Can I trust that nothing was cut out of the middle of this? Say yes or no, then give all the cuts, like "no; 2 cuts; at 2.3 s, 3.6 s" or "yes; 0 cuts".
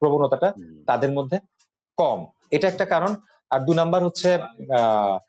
yes; 0 cuts